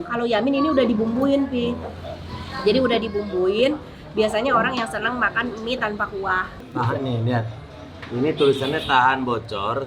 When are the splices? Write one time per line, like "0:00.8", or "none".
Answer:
0:06.6